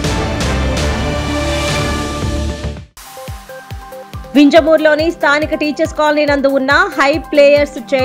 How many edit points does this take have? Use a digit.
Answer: 1